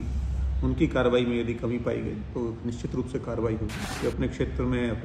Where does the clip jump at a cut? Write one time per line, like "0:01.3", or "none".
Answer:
0:03.8